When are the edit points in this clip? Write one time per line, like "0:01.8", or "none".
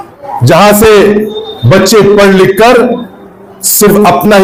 none

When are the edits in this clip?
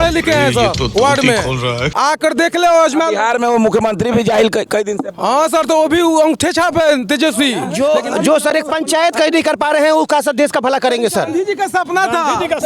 0:07.6

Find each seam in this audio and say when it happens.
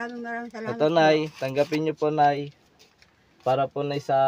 none

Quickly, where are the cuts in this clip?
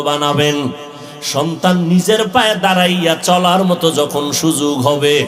none

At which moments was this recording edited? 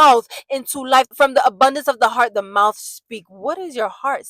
0:01.1

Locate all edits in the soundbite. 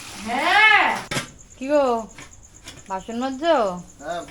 0:01.1

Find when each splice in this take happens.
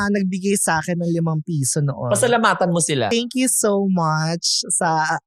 0:03.1

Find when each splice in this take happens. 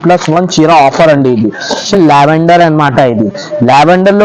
0:01.9

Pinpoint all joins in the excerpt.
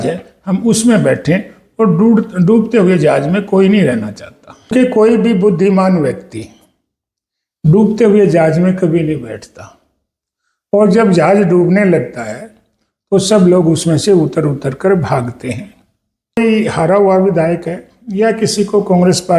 0:04.7
0:16.4

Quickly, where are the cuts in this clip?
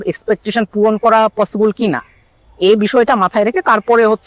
none

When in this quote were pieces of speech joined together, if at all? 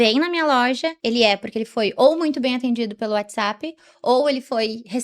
0:00.9

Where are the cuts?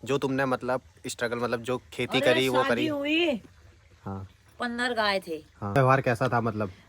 0:05.8

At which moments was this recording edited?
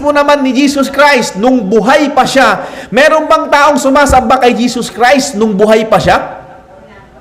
0:02.7

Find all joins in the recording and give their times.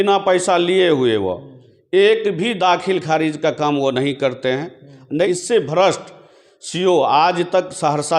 0:05.3

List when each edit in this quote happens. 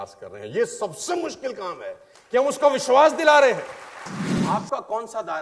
0:04.3

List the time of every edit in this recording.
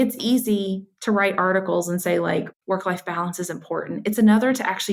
0:02.5

